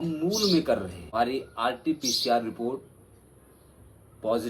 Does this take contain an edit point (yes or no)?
yes